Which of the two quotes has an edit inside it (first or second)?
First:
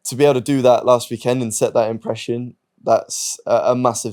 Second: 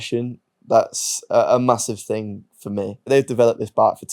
second